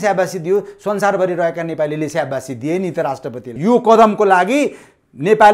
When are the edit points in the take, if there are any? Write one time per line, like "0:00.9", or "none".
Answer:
0:03.5